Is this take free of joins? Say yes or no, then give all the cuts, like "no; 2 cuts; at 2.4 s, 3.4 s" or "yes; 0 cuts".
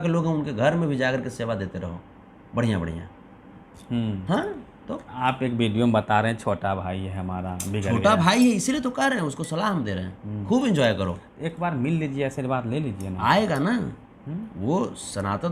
yes; 0 cuts